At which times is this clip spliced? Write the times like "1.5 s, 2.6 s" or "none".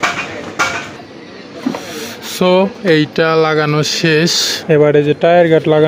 4.5 s